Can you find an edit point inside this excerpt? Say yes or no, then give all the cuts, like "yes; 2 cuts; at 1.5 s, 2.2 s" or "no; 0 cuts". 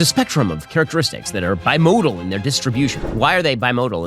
yes; 1 cut; at 3.0 s